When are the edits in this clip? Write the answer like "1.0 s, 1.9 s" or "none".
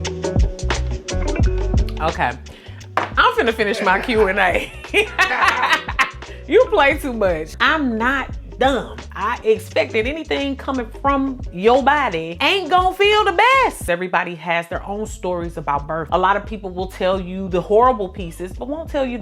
7.5 s, 13.8 s